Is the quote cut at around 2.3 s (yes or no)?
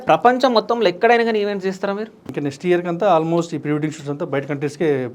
yes